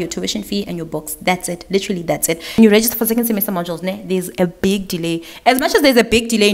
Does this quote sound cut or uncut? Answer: cut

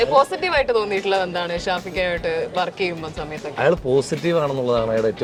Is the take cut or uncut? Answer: uncut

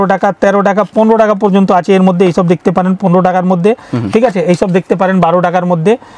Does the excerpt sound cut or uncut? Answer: uncut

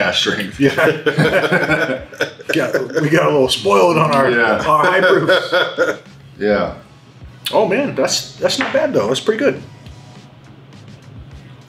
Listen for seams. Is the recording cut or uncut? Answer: uncut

